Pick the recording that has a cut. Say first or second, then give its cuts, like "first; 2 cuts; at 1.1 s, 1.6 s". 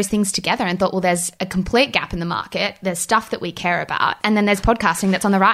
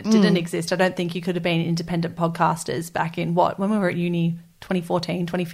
first; 2 cuts; at 1.4 s, 4.2 s